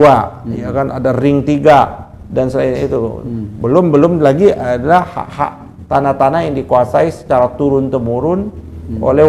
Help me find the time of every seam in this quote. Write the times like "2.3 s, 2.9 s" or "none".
none